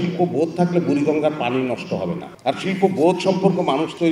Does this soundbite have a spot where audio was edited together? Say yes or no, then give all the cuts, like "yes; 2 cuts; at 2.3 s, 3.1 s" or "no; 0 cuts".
yes; 1 cut; at 2.3 s